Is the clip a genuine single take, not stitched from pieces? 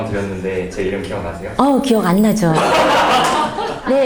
yes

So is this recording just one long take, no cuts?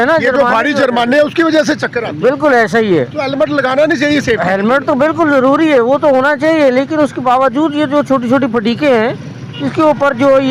yes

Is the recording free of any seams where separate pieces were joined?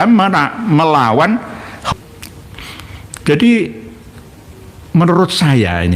no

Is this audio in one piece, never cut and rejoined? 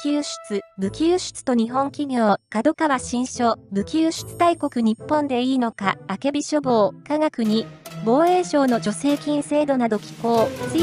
no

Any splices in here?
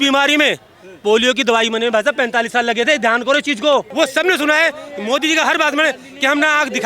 yes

